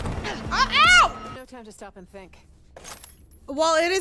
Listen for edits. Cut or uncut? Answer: cut